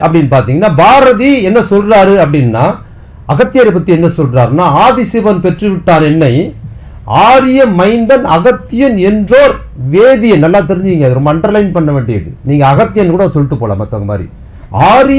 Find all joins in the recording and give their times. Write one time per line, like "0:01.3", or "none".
none